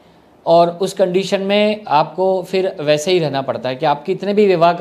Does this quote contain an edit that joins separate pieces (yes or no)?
no